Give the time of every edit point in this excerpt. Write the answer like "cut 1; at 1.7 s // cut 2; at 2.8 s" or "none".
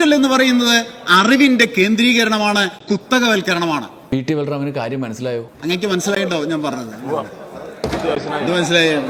none